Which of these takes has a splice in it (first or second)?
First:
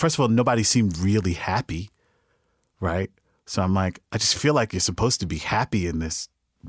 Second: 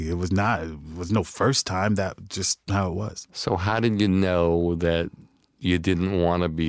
second